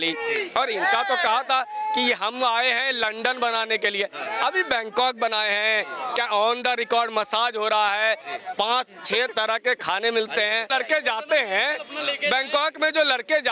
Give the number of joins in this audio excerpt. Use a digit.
0